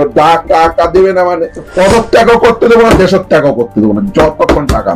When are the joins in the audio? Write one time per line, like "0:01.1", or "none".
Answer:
0:01.6